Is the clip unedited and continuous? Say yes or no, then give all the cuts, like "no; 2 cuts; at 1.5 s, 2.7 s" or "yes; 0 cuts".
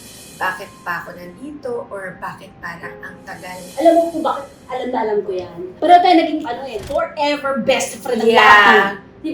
no; 1 cut; at 3.6 s